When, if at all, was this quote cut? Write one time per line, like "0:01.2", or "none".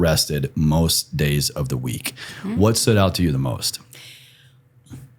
none

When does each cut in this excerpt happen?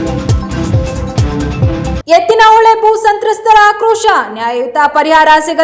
none

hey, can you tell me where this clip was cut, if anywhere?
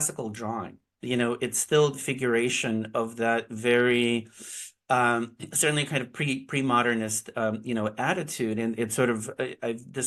none

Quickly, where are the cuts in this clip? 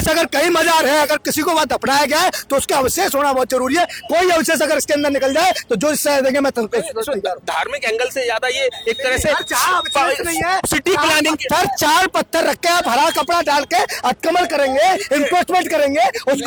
none

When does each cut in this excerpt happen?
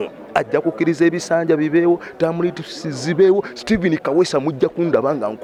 none

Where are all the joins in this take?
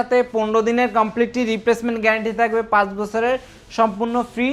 none

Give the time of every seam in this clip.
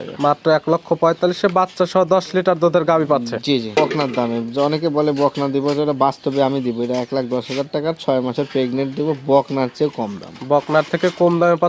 0:03.7

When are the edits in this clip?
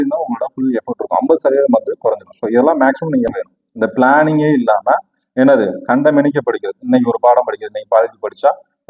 0:03.3

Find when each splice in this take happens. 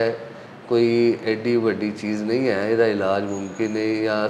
none

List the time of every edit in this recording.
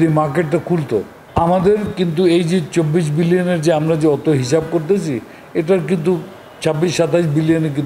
0:01.2

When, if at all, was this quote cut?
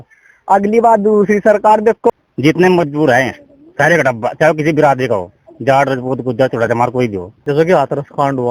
0:02.1
0:07.3

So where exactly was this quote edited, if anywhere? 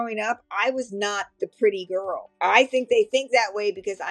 0:02.3

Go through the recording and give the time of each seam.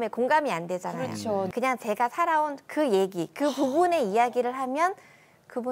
0:01.5

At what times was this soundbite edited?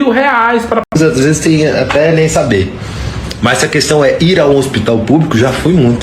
0:00.9

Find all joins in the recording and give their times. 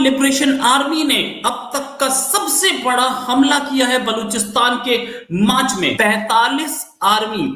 0:05.9

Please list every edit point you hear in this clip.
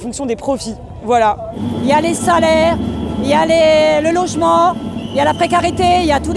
0:01.6

